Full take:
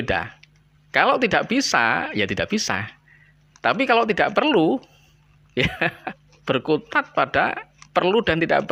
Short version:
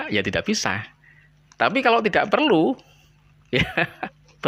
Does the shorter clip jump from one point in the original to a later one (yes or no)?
no